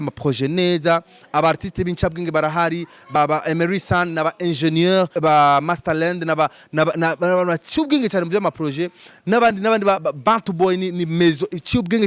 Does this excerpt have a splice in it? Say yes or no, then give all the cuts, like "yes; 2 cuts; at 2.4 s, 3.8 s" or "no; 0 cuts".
yes; 2 cuts; at 3.1 s, 5.1 s